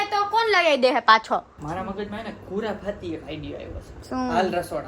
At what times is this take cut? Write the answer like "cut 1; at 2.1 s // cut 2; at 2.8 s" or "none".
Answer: cut 1; at 1.5 s // cut 2; at 3.9 s